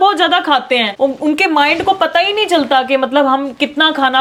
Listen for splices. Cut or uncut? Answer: uncut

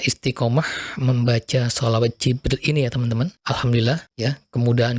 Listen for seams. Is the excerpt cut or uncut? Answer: cut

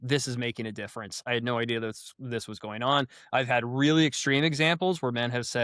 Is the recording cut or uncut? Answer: cut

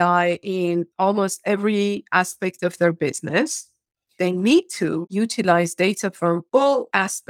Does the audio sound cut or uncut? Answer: cut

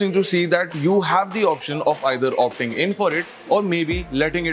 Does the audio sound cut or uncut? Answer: uncut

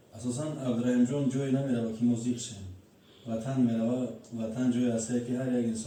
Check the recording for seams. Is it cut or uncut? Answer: uncut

